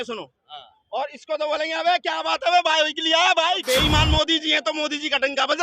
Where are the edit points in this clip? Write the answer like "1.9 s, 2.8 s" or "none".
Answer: 3.6 s